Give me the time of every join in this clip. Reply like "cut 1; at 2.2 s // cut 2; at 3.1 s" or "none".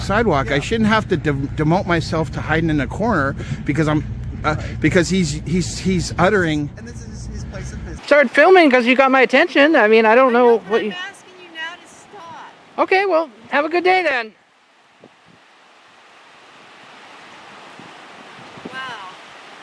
cut 1; at 7.9 s